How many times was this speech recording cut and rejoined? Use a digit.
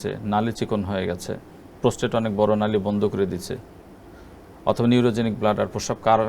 0